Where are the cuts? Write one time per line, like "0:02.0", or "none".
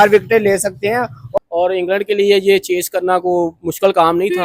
0:01.2